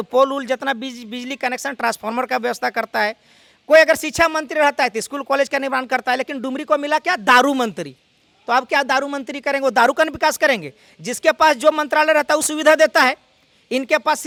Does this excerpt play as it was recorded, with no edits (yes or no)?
yes